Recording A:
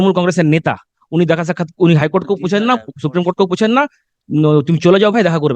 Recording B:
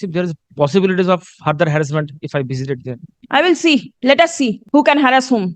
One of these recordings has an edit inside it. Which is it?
B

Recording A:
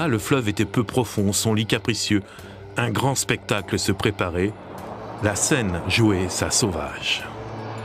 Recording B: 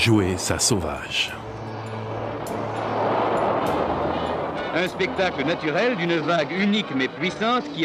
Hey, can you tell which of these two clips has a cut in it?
B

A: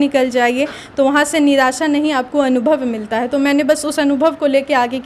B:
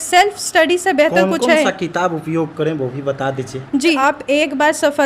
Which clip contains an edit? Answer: B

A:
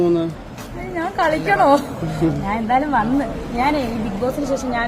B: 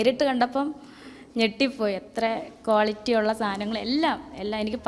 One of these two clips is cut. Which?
A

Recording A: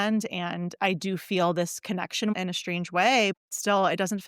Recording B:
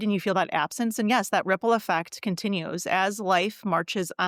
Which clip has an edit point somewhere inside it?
A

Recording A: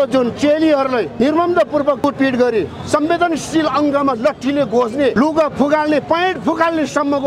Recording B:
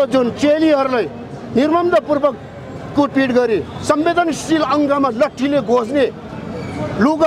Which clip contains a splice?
A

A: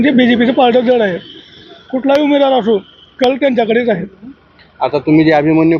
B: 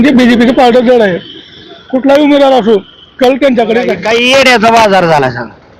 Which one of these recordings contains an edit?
B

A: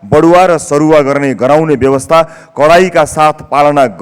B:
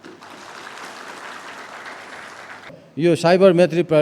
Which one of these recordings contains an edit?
B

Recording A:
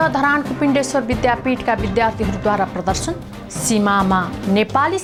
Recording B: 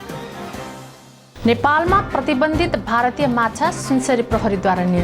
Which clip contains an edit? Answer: B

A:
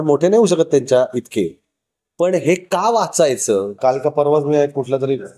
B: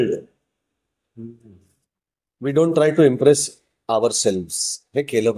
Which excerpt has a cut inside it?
A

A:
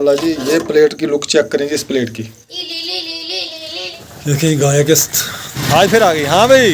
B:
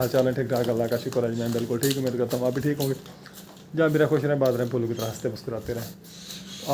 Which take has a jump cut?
A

